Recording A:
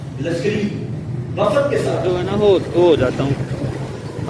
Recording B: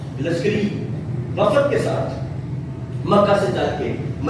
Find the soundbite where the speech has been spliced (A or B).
A